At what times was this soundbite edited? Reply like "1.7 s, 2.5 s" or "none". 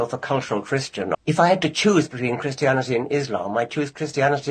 1.1 s